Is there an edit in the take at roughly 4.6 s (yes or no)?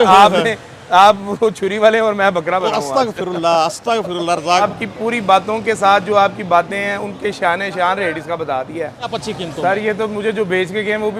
yes